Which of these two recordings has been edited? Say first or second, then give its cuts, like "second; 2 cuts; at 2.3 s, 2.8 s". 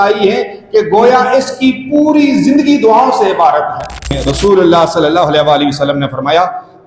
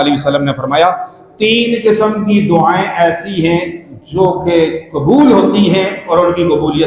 first; 1 cut; at 4.2 s